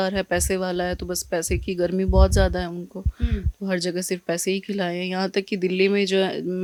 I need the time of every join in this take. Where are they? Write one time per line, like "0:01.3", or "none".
none